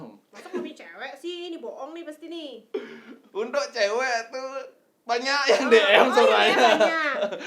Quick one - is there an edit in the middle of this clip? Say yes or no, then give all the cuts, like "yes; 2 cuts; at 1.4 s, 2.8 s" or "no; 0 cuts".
no; 0 cuts